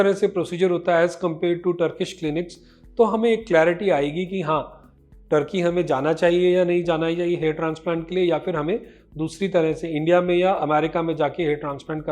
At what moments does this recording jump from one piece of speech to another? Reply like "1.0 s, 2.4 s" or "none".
none